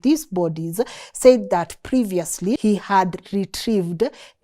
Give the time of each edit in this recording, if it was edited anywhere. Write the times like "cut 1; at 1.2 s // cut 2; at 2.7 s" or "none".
cut 1; at 2.6 s